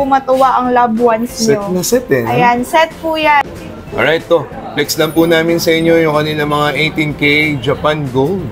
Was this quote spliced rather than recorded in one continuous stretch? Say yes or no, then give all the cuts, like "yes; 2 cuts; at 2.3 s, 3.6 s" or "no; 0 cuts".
yes; 1 cut; at 3.4 s